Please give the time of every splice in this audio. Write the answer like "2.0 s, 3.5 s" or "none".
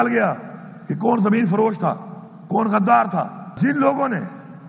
3.5 s

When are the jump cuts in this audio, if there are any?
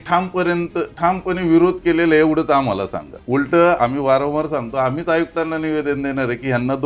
3.1 s, 3.8 s

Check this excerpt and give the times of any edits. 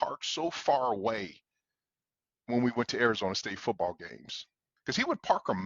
4.7 s

